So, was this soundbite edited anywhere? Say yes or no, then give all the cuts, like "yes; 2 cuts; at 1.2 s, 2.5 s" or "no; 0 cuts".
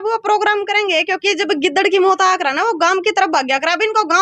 no; 0 cuts